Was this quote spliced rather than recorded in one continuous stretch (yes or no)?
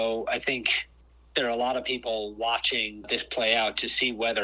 yes